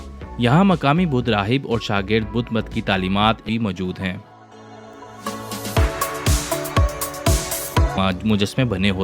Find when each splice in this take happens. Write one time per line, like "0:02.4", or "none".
0:03.5
0:08.0